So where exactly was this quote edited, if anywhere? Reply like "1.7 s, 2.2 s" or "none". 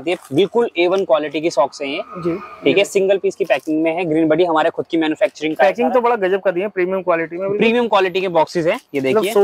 none